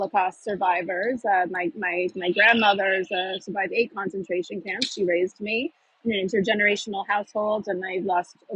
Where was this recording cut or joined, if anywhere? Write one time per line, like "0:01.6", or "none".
none